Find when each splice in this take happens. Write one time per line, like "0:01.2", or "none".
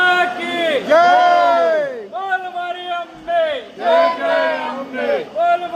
none